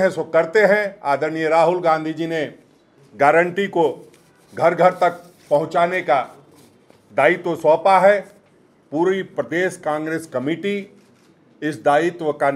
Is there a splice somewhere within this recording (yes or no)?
no